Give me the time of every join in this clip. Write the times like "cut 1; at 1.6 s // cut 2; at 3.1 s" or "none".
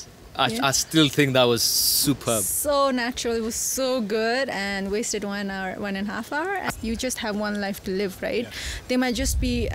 cut 1; at 6.7 s